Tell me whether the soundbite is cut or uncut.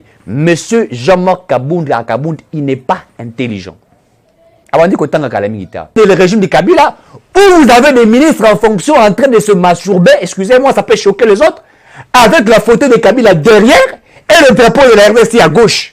cut